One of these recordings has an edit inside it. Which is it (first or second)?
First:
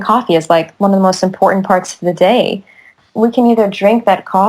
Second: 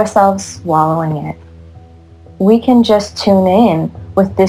first